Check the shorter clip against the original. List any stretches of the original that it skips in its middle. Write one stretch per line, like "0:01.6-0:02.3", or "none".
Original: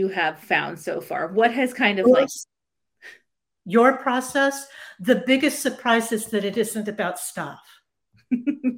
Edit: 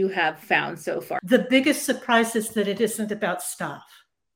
0:01.1-0:04.9